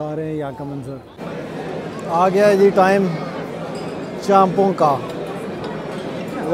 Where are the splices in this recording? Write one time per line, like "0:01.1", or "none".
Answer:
0:01.1